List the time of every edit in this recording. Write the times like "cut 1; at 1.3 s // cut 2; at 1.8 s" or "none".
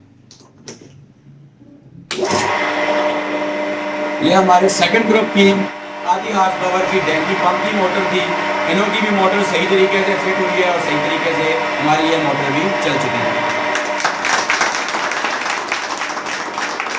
none